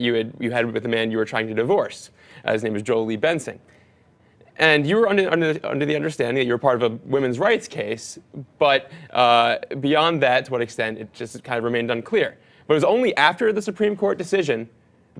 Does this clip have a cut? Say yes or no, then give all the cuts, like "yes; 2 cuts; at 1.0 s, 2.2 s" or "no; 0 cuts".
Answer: yes; 1 cut; at 14.2 s